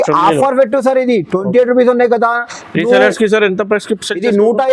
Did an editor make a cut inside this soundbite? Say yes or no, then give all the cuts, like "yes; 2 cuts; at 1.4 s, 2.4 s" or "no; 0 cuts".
no; 0 cuts